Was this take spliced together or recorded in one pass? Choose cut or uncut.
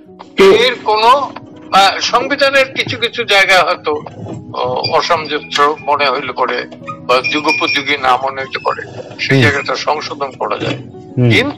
uncut